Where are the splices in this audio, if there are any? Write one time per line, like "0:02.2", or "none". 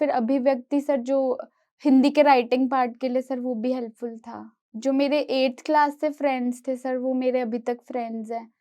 0:04.6